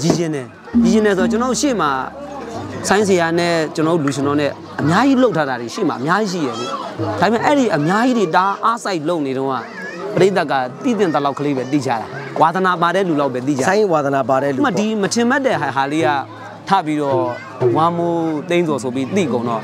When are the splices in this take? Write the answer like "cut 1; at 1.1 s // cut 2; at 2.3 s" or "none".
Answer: none